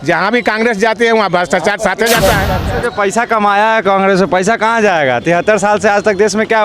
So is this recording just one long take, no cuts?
no; 1 cut; at 2.6 s

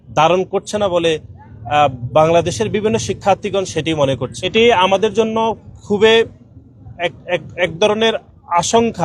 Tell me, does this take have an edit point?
yes; 1 cut; at 4.3 s

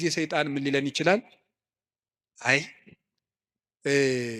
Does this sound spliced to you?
no; 0 cuts

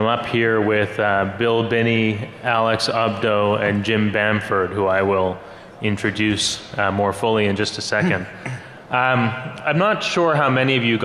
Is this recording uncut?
yes; 0 cuts

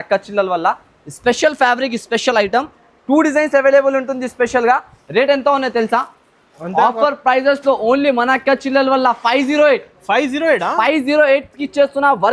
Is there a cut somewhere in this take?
no; 0 cuts

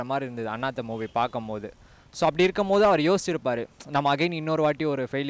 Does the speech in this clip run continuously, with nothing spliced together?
yes; 0 cuts

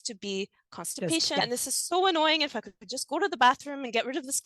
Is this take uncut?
no; 1 cut; at 1.4 s

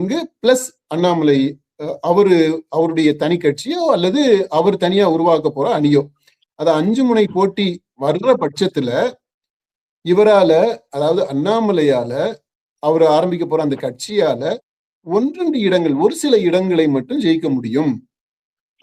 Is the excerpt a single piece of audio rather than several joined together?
yes; 0 cuts

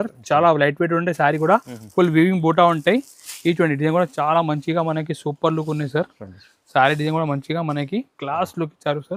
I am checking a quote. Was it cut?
no; 0 cuts

